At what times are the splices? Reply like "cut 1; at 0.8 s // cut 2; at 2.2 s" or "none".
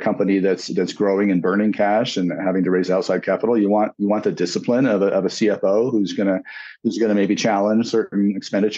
none